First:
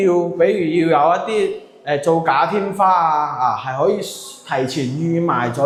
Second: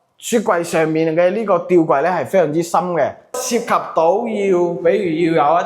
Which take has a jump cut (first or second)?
second